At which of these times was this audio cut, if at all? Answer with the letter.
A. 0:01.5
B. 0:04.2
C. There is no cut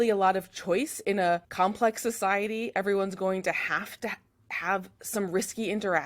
A